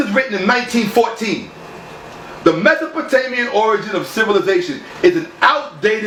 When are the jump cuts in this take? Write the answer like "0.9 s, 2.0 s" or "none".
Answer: none